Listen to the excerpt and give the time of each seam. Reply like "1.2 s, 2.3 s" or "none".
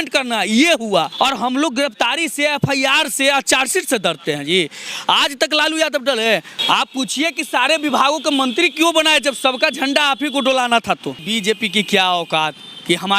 1.1 s, 6.5 s, 11.2 s